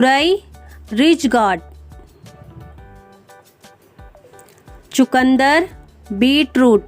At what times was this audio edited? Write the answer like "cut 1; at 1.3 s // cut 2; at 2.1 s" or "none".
cut 1; at 2.9 s // cut 2; at 4.9 s